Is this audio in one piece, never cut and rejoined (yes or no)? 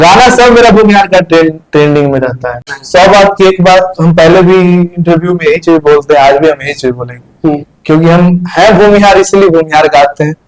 no